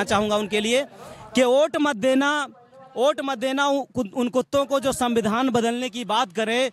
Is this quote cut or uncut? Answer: uncut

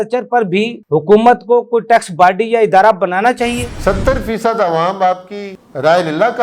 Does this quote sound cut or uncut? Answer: cut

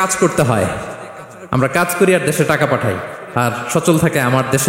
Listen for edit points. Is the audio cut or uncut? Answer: uncut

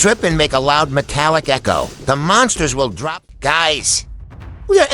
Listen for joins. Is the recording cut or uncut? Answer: cut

